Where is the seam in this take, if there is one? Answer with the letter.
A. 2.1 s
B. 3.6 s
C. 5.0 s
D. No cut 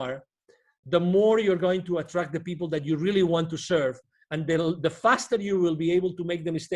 D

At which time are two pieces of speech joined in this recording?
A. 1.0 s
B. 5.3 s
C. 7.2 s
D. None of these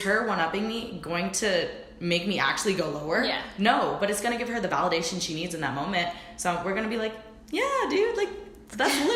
D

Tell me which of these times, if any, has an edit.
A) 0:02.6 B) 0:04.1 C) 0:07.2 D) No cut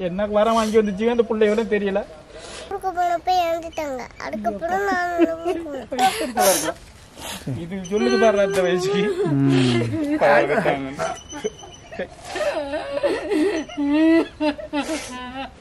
A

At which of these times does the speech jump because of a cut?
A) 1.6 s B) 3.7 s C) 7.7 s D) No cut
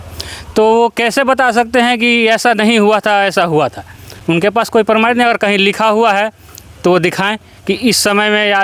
D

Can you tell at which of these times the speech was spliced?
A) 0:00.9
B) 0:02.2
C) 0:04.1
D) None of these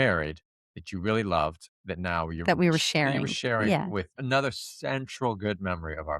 C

